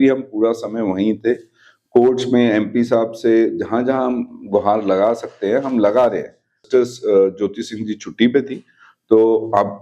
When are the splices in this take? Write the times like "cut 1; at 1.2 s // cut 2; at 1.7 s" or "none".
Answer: cut 1; at 6.6 s